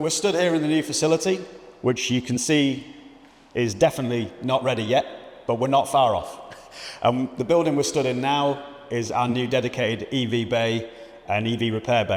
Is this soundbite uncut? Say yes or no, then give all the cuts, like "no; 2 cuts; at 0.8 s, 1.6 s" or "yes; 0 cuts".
yes; 0 cuts